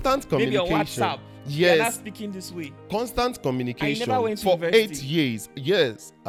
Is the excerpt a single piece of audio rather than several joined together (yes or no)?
yes